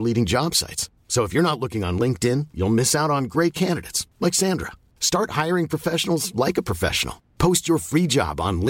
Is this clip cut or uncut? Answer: uncut